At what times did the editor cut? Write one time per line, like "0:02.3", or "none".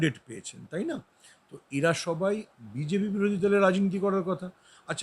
none